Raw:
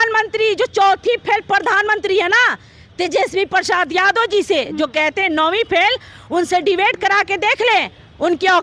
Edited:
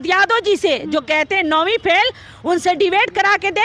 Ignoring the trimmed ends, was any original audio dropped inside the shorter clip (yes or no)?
no